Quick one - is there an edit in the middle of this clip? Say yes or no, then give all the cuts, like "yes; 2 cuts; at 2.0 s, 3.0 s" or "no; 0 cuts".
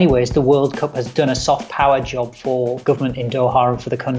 yes; 2 cuts; at 1.0 s, 2.8 s